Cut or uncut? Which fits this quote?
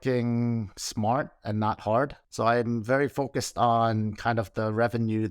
cut